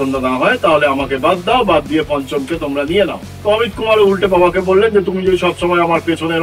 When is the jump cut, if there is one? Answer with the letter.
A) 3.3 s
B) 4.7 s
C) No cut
A